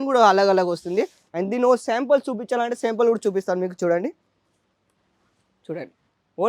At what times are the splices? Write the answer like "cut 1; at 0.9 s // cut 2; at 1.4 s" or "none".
none